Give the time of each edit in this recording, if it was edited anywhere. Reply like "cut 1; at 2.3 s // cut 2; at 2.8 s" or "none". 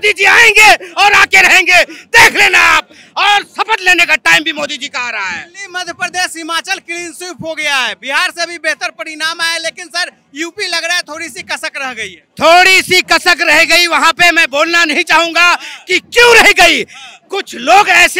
none